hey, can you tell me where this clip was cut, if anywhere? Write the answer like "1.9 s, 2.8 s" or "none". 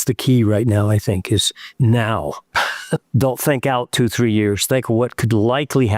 1.6 s, 2.6 s